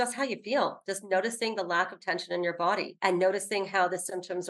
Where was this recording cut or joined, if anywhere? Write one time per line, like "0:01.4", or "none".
none